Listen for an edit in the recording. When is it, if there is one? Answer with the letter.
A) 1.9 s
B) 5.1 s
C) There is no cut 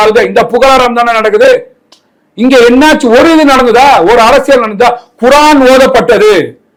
C